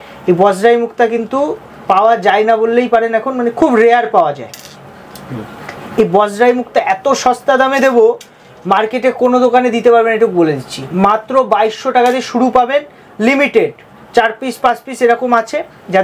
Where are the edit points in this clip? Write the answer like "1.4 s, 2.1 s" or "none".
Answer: none